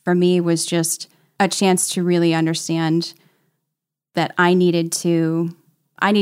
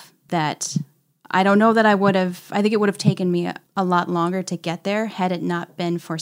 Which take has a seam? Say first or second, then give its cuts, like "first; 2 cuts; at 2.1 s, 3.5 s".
second; 1 cut; at 3.6 s